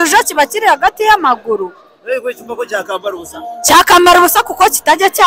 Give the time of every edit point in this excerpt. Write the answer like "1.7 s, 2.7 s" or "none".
none